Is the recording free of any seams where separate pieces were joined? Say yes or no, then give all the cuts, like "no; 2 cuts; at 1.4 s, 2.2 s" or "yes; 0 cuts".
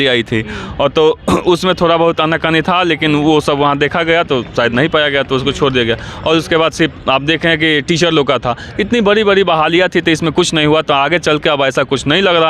yes; 0 cuts